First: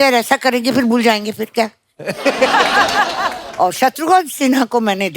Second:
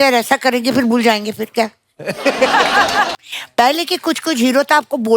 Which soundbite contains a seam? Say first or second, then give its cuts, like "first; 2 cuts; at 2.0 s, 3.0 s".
second; 1 cut; at 3.2 s